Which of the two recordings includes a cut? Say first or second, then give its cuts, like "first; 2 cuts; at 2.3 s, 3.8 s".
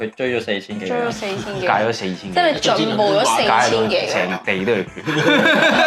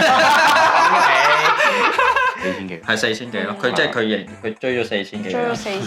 second; 1 cut; at 2.4 s